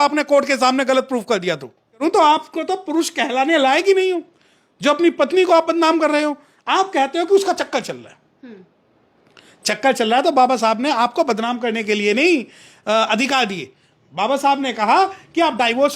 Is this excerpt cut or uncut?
cut